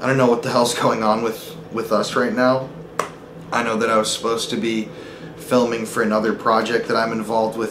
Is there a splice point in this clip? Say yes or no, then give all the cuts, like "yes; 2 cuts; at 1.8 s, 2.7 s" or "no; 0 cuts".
no; 0 cuts